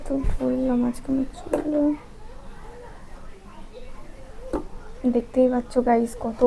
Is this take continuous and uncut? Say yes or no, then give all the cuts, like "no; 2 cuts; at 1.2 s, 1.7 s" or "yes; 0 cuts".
yes; 0 cuts